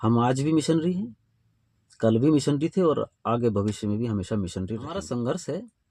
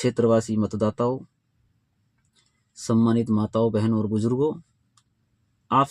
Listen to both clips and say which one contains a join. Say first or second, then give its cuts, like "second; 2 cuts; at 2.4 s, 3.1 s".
first; 1 cut; at 4.9 s